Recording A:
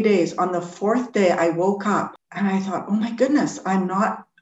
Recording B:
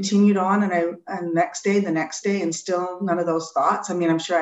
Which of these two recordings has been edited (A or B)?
A